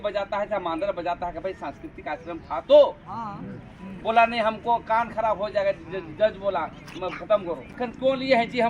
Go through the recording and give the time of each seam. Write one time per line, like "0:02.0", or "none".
0:07.7